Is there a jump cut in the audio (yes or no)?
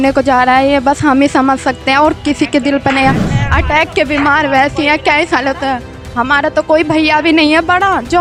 no